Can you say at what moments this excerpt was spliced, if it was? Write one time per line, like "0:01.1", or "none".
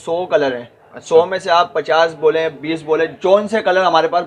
none